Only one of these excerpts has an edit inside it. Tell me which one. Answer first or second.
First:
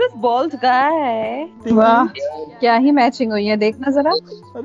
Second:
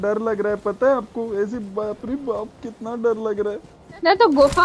first